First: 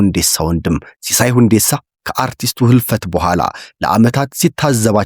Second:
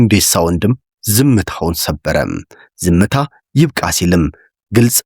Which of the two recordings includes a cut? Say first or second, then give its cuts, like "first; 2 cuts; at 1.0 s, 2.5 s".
second; 1 cut; at 0.9 s